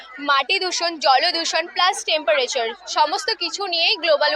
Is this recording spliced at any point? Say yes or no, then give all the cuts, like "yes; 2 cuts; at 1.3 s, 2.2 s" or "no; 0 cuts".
no; 0 cuts